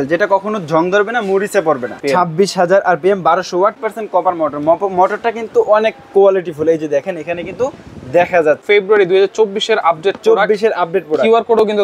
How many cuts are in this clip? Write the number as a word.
three